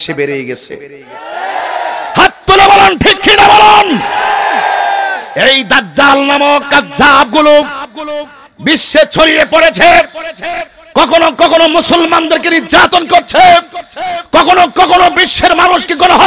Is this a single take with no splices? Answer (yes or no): yes